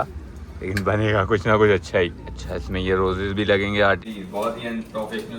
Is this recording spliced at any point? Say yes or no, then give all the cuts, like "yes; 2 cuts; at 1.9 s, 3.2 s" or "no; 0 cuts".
yes; 1 cut; at 4.0 s